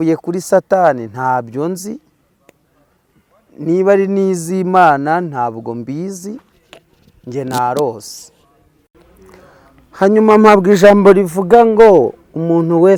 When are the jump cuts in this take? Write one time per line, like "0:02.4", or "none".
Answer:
none